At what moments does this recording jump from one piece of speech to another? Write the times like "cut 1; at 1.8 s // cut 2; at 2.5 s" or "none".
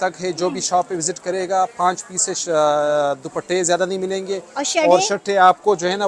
none